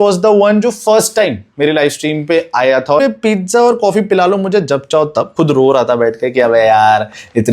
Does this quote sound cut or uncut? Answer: cut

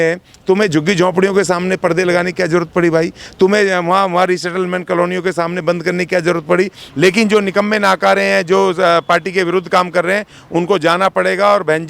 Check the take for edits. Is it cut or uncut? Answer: cut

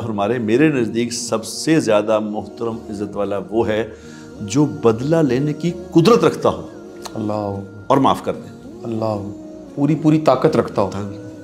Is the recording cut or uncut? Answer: uncut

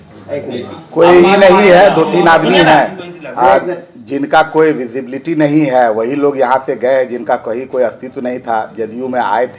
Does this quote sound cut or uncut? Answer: uncut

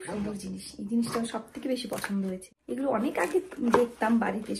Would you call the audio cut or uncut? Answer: cut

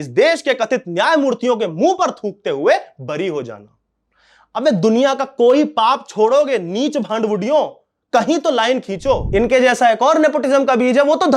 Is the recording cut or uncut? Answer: cut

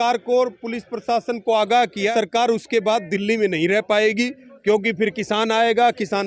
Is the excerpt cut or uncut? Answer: cut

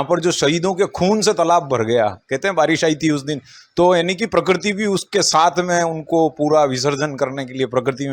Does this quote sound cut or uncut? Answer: uncut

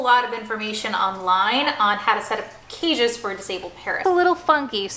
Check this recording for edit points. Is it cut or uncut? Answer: cut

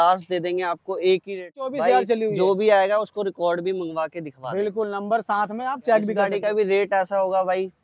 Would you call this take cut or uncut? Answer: cut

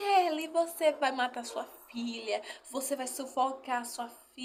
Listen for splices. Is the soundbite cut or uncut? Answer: uncut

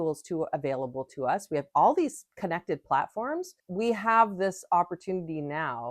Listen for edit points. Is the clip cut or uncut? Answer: cut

